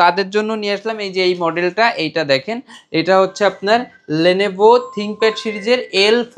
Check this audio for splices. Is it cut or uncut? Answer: uncut